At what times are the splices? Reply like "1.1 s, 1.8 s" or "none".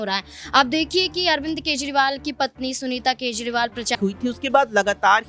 4.0 s